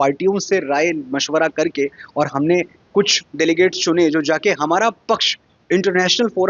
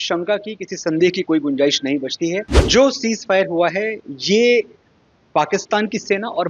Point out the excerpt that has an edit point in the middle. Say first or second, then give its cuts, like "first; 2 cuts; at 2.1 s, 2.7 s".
second; 1 cut; at 2.5 s